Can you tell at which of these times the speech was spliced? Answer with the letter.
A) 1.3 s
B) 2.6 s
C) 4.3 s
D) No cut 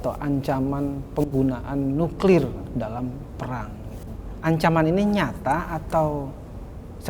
C